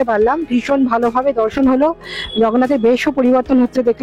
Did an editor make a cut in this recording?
no; 0 cuts

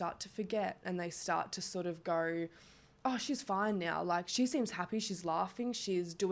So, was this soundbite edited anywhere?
no; 0 cuts

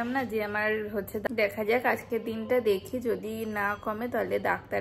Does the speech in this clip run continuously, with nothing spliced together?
no; 1 cut; at 1.3 s

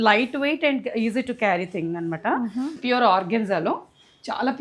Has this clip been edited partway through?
yes; 1 cut; at 2.8 s

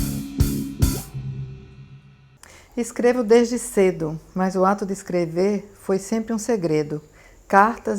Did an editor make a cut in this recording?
yes; 1 cut; at 2.0 s

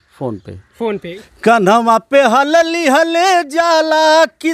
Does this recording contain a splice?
yes; 1 cut; at 1.0 s

